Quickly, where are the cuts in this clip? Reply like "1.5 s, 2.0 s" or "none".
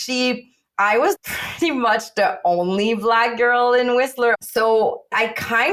4.3 s